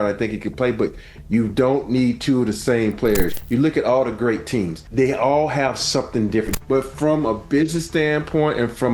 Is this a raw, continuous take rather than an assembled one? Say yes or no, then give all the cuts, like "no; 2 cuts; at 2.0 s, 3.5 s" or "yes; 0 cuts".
no; 3 cuts; at 3.4 s, 4.8 s, 6.5 s